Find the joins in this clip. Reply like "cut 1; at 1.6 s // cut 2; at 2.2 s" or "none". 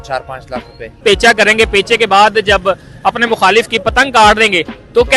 cut 1; at 1.0 s